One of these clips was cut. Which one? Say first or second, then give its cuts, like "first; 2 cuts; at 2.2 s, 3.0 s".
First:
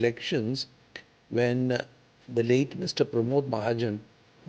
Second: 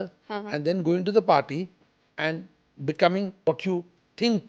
second; 1 cut; at 3.4 s